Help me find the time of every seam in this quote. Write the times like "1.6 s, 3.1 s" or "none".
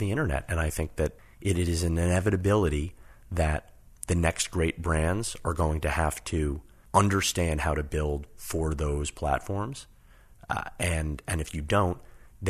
1.2 s, 6.7 s